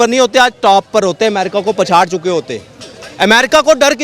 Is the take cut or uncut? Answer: uncut